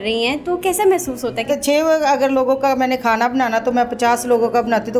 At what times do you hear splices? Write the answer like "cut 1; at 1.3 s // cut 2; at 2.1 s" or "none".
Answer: cut 1; at 1.5 s